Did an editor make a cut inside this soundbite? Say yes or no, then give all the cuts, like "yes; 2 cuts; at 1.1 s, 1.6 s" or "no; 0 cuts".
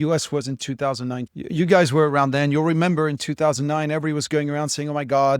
yes; 1 cut; at 1.3 s